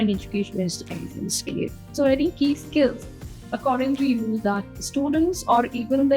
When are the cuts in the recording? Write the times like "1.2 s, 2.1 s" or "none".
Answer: 1.9 s